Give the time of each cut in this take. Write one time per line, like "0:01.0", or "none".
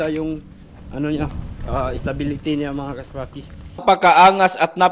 0:03.8